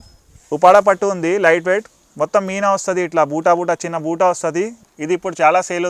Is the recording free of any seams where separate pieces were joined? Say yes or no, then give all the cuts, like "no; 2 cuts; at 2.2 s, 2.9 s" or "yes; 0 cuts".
no; 1 cut; at 4.8 s